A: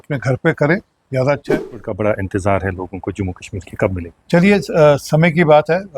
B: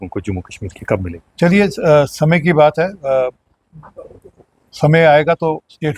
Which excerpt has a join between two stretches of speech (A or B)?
A